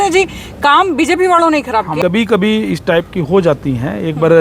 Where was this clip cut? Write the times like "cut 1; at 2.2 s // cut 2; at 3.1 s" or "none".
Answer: cut 1; at 1.9 s